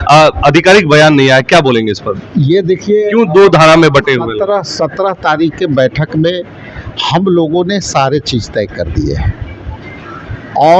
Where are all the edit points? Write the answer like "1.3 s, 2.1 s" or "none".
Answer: none